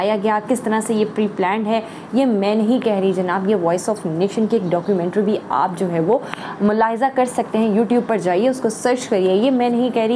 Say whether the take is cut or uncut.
uncut